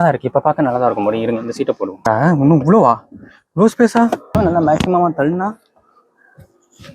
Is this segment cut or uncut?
cut